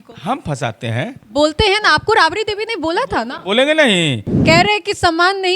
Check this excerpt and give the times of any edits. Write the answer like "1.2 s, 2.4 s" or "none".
4.3 s